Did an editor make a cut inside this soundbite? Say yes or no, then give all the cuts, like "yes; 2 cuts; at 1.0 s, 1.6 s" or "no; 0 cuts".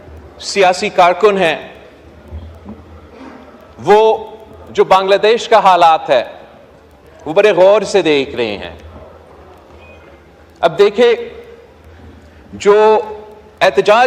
no; 0 cuts